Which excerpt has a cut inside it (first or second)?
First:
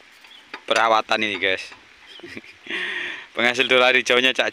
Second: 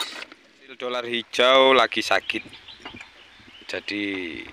second